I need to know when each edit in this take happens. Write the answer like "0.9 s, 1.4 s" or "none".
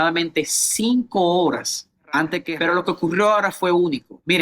2.4 s